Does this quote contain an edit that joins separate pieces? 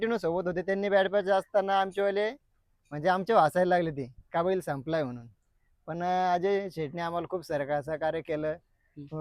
no; 0 cuts

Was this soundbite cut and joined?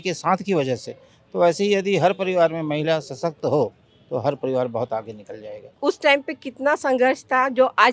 yes; 1 cut; at 5.6 s

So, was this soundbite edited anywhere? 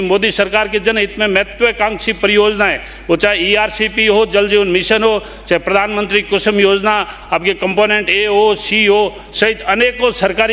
no; 0 cuts

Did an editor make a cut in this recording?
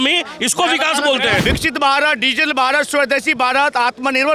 yes; 1 cut; at 1.4 s

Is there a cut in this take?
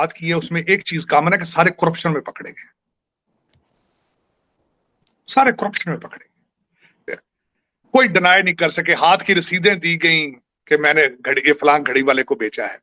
no; 0 cuts

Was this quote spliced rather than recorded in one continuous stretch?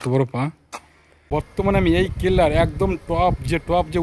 yes; 1 cut; at 1.2 s

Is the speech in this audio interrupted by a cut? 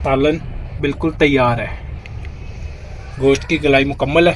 yes; 1 cut; at 2.0 s

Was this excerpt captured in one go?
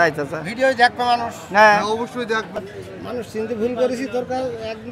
no; 1 cut; at 2.6 s

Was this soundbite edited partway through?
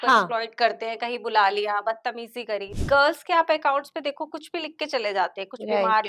yes; 1 cut; at 2.7 s

